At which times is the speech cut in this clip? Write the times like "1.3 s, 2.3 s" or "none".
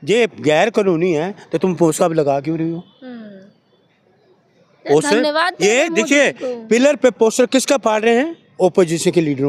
none

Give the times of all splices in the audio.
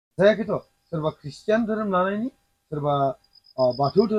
none

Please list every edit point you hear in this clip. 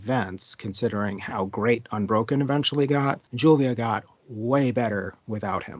3.3 s

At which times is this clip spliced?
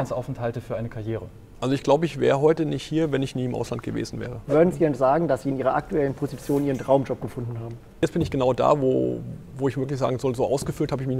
1.4 s, 4.4 s, 8.0 s

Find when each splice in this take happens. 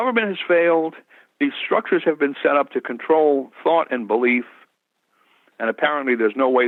none

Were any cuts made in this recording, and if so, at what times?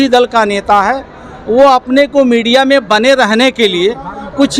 none

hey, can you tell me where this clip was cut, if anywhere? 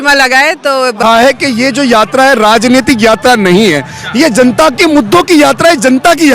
1.0 s

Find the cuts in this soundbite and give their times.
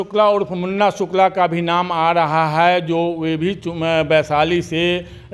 none

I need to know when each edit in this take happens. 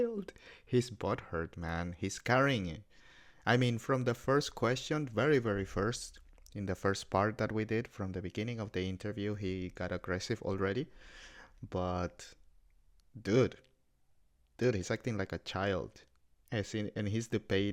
none

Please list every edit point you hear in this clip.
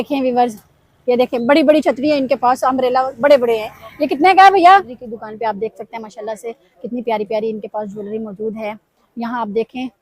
5.1 s

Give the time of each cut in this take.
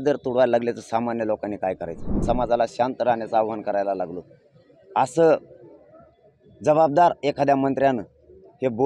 2.2 s

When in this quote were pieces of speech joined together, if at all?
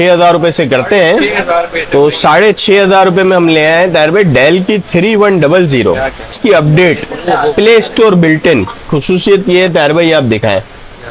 6.4 s, 8.9 s

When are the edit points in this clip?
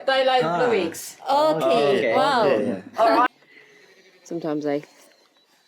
3.3 s

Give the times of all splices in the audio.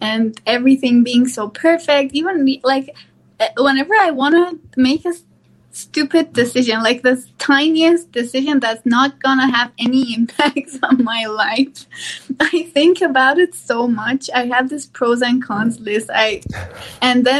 none

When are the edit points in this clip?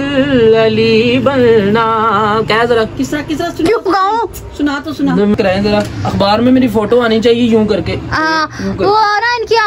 2.3 s, 5.3 s, 8.5 s

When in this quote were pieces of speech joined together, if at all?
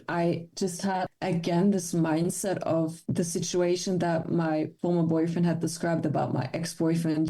3.0 s, 4.7 s

